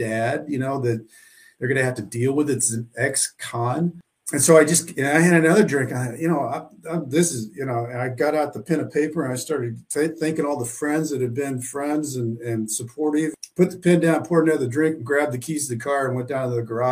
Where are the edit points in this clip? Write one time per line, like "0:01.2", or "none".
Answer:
0:04.1
0:13.3

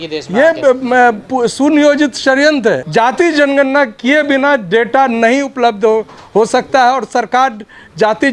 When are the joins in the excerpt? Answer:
0:02.8

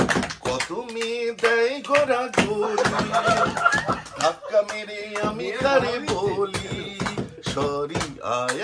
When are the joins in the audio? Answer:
none

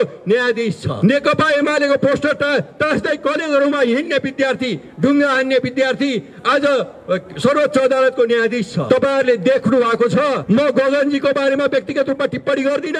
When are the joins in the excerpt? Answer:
0:00.9
0:08.8
0:10.4

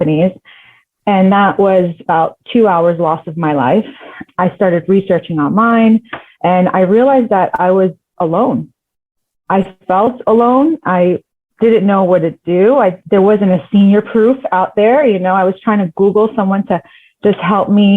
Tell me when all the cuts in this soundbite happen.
0:13.0

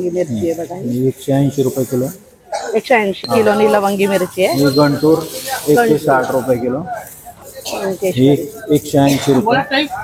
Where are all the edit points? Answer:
0:03.3
0:07.3

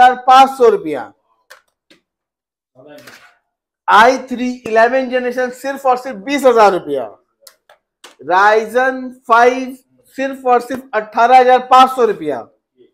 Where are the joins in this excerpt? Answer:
none

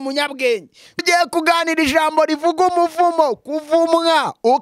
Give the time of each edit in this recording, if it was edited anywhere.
0:01.0

